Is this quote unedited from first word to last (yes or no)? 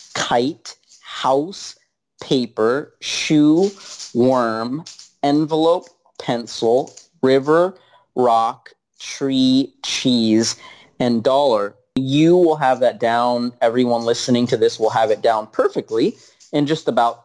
no